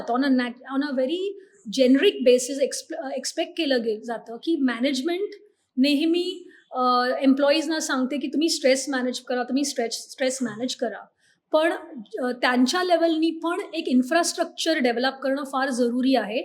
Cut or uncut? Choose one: uncut